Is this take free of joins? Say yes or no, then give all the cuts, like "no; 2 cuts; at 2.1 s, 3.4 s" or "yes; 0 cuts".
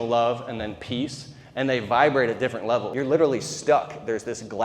no; 1 cut; at 2.9 s